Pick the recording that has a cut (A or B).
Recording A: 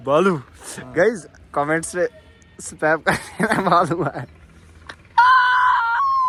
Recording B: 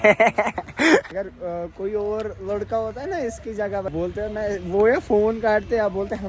B